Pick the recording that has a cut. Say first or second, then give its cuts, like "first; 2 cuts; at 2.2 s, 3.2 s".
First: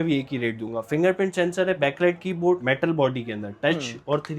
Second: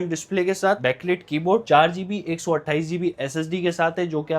first; 2 cuts; at 1.8 s, 2.6 s